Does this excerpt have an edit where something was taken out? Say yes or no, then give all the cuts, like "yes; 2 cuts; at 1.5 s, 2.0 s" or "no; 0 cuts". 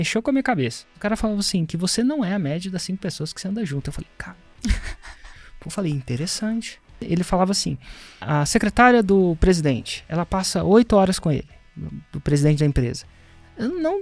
yes; 3 cuts; at 1.0 s, 7.0 s, 8.2 s